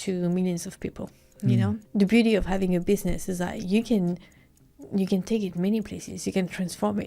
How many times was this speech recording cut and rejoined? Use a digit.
1